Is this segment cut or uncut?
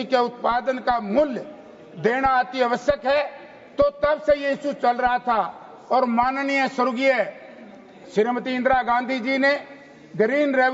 uncut